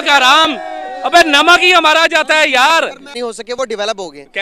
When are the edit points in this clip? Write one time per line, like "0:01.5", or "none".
0:03.1